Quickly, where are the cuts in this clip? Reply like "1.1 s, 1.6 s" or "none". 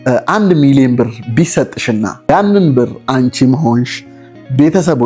2.3 s